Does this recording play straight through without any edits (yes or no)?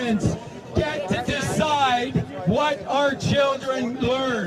yes